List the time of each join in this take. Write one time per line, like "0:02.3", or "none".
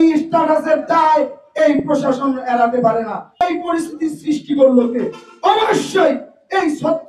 0:03.4